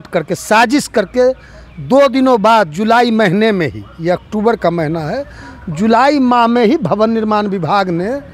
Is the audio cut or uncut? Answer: uncut